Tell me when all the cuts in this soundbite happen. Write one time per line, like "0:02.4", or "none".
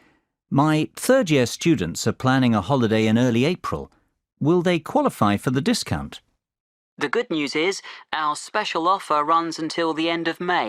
0:02.6

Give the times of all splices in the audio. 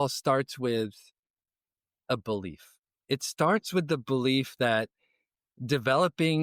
none

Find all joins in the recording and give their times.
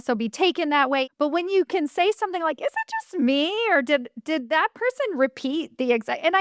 0:01.1

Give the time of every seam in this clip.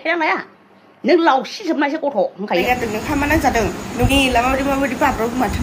0:02.6

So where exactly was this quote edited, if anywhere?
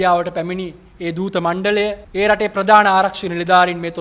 0:02.0

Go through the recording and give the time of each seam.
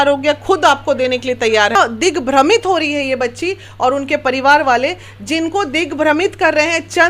0:01.8

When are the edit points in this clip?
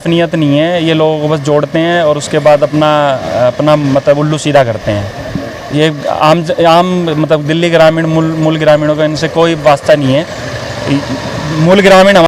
none

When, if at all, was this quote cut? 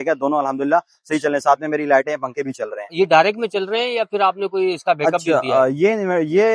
none

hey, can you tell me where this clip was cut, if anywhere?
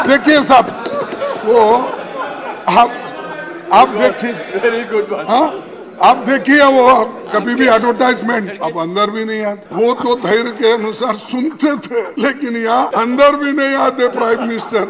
0:08.5
0:09.6
0:12.1
0:12.9

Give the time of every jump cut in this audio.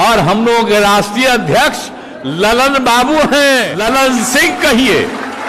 0:03.7

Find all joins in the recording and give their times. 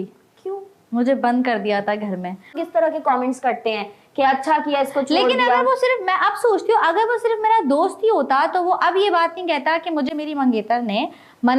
0:02.6

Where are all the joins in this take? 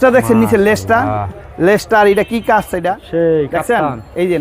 0:03.0

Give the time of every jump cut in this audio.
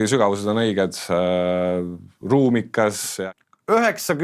0:03.1

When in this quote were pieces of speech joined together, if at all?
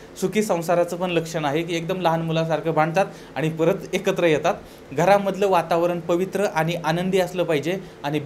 0:04.8

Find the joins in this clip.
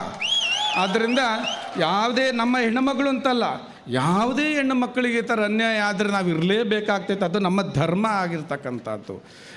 none

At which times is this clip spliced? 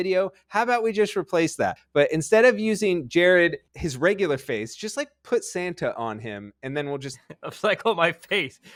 none

